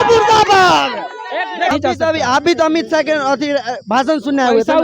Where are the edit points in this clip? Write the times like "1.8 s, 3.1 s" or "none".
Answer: 1.7 s